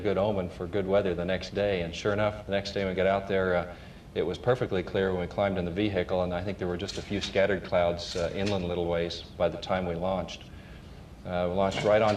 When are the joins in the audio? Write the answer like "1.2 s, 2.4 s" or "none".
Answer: 5.0 s